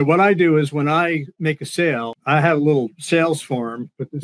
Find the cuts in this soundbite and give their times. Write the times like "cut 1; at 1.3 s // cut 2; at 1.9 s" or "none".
cut 1; at 1.5 s